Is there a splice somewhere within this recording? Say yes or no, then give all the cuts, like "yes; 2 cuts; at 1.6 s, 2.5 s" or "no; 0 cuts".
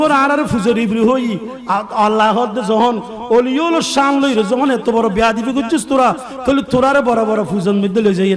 no; 0 cuts